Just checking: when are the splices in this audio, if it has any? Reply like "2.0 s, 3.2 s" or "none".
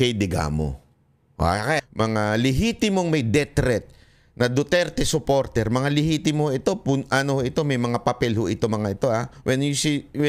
1.8 s